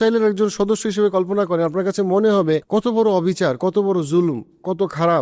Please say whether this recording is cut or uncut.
cut